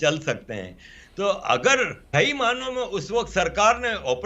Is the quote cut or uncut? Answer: cut